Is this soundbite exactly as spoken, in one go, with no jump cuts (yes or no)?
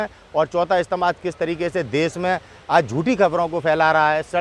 yes